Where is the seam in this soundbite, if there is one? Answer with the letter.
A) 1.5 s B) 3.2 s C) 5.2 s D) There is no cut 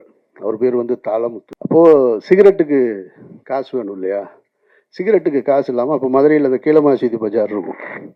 A